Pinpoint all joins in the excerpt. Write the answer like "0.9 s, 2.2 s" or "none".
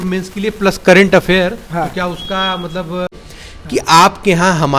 3.3 s